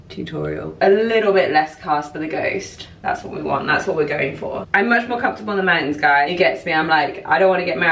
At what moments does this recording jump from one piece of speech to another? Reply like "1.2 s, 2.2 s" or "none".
0.8 s, 4.6 s, 6.3 s